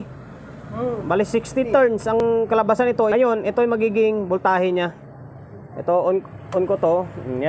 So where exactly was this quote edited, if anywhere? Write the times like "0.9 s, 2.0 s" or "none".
2.2 s, 3.1 s